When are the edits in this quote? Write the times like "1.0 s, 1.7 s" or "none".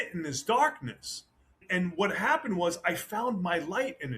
1.5 s